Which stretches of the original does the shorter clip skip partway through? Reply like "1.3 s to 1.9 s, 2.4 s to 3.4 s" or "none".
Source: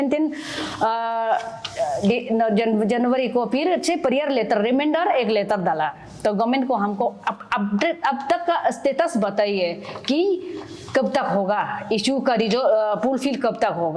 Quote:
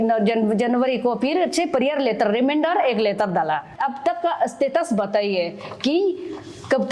6.0 s to 8.0 s